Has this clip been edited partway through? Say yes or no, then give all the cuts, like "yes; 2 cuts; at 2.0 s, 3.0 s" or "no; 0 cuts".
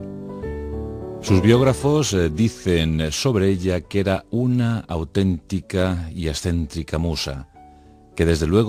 no; 0 cuts